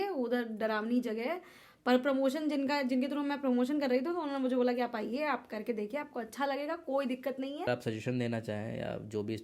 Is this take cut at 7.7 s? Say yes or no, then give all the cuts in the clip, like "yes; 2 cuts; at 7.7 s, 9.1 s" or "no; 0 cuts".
yes; 1 cut; at 7.7 s